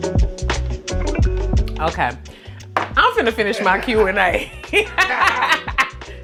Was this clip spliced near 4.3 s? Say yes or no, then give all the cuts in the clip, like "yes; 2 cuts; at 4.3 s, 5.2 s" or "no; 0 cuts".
no; 0 cuts